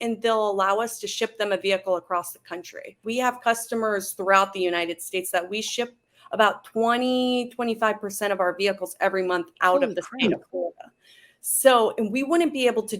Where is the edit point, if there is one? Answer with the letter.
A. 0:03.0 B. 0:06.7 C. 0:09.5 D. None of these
A